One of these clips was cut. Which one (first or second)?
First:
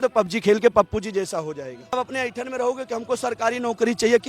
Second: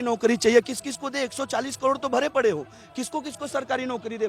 first